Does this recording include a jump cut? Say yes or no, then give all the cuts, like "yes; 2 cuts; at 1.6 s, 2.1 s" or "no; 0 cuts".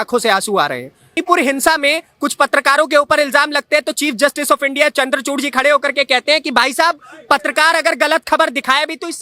yes; 1 cut; at 1.2 s